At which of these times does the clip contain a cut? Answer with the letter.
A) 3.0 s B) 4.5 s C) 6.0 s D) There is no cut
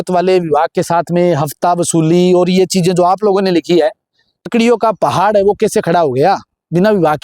B